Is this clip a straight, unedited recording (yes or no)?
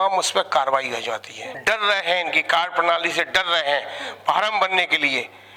no